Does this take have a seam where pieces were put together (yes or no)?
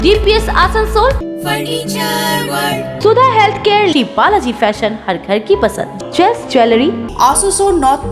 yes